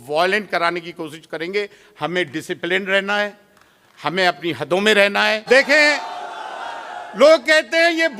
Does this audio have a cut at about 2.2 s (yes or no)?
no